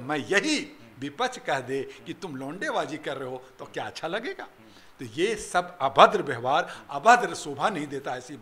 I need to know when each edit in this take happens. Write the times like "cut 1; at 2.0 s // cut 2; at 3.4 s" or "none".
none